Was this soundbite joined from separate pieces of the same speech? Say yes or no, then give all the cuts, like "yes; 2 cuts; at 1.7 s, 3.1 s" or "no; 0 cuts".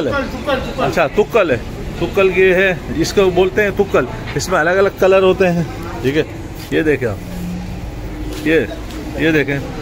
no; 0 cuts